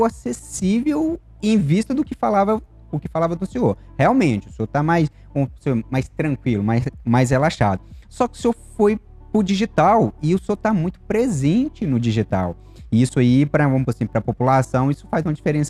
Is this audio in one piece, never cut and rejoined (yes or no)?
yes